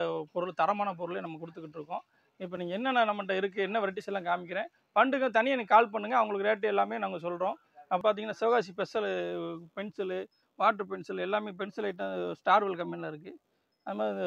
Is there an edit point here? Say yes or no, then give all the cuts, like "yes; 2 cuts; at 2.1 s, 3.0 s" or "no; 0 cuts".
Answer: yes; 1 cut; at 8.0 s